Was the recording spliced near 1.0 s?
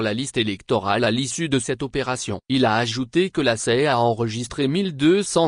yes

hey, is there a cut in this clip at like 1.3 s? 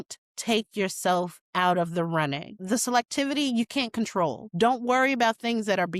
no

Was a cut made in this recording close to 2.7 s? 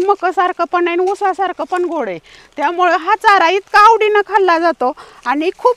no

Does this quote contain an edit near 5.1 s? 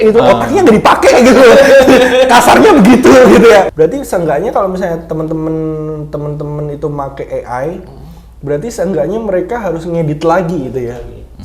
no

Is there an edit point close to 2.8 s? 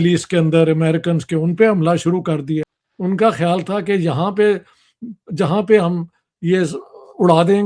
yes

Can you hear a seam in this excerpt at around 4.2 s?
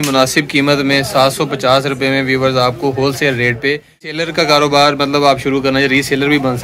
yes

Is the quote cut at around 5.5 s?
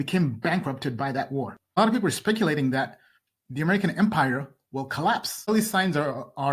yes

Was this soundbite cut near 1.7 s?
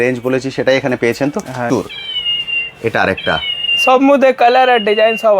yes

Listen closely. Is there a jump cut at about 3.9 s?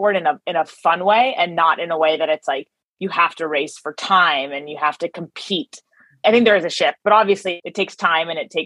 no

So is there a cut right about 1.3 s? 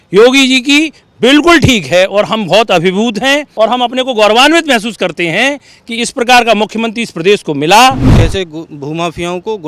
no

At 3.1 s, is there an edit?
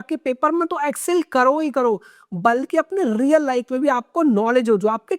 no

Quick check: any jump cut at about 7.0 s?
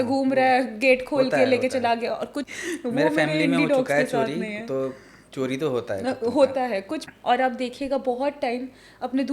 yes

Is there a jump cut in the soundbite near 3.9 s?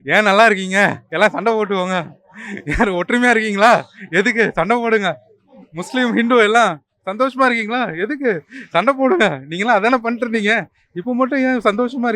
no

